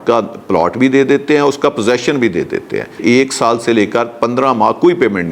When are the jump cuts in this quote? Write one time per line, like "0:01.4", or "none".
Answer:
0:03.0